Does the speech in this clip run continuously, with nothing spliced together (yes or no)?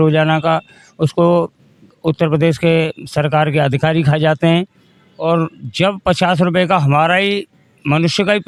yes